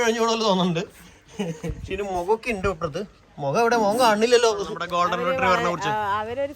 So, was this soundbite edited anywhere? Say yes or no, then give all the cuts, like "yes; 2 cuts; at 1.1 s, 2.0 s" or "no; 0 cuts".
yes; 1 cut; at 4.8 s